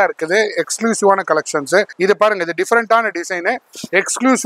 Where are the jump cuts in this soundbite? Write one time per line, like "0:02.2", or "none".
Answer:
0:01.9